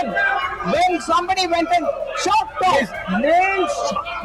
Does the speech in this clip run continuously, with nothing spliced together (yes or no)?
yes